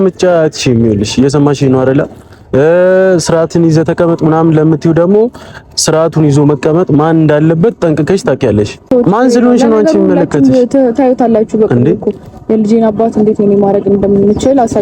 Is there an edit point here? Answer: yes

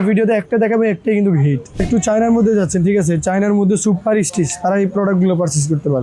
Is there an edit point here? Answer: yes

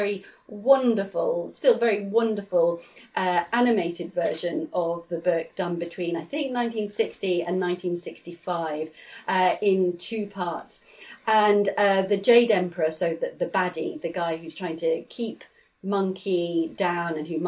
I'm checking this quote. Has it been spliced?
no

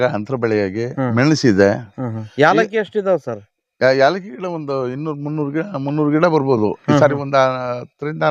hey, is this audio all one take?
yes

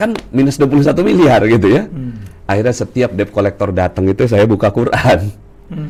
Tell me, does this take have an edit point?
no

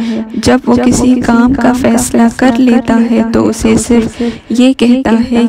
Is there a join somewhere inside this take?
no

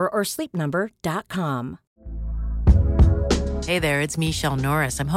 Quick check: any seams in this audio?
yes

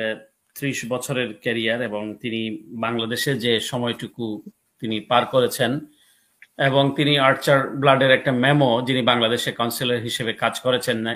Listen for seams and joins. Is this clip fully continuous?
yes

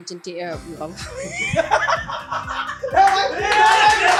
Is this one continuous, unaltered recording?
yes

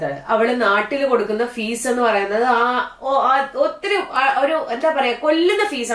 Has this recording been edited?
no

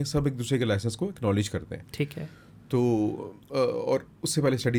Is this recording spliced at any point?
no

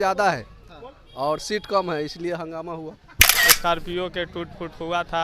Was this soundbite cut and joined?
yes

